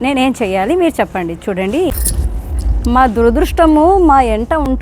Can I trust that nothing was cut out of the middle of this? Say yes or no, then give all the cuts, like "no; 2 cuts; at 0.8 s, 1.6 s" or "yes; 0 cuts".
no; 1 cut; at 1.9 s